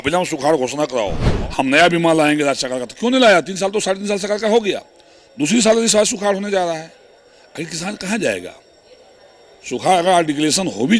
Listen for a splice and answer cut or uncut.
cut